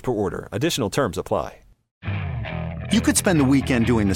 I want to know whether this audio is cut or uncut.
cut